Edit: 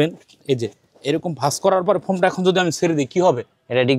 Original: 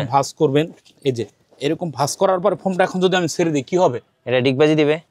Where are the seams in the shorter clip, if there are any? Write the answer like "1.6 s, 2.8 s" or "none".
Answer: none